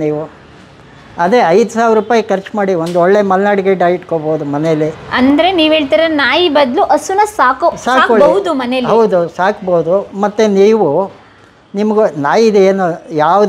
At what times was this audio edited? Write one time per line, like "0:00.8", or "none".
none